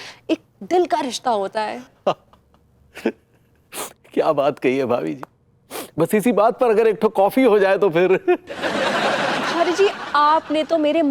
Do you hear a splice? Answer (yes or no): no